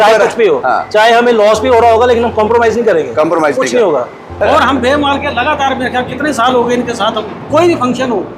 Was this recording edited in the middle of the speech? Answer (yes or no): yes